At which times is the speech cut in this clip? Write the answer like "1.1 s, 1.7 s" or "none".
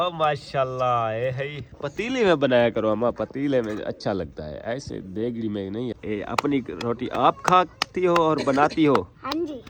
6.0 s

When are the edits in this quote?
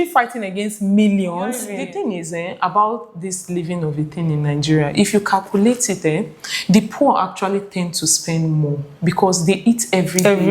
1.7 s

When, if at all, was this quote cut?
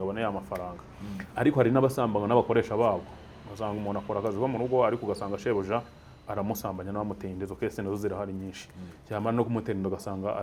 none

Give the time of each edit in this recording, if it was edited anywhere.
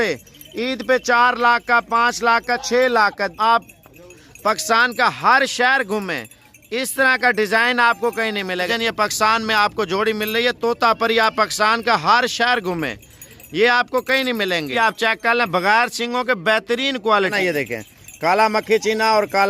3.3 s, 8.7 s, 14.7 s, 17.3 s

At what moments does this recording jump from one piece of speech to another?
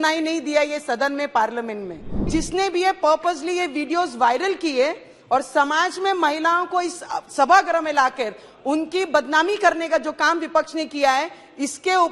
2.3 s

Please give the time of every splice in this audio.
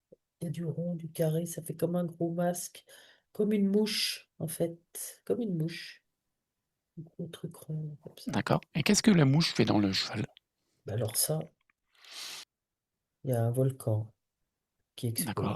12.4 s

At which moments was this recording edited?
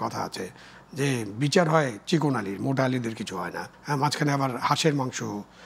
3.7 s

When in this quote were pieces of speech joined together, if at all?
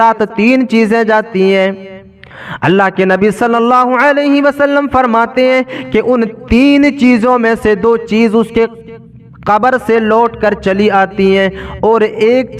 none

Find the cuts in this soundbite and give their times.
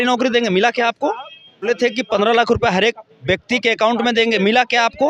1.6 s

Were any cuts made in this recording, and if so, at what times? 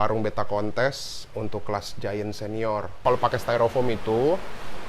3.0 s

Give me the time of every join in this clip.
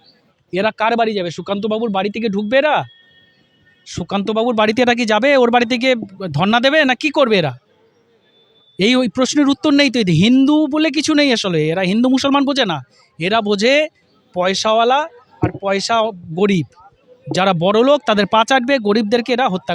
none

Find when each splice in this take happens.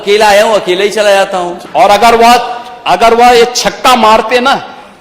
1.6 s

